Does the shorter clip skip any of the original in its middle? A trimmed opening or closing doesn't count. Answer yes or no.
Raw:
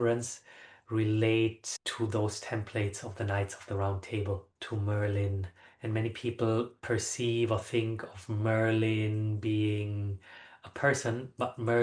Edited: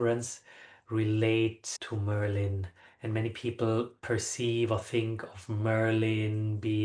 yes